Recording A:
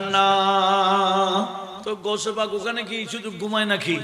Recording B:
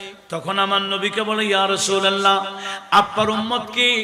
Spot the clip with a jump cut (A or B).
A